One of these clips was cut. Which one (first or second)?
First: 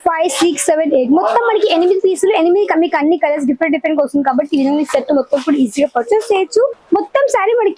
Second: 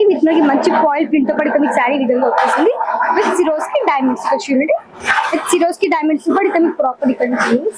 first